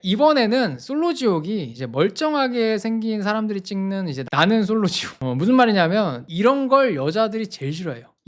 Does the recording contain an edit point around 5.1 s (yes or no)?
yes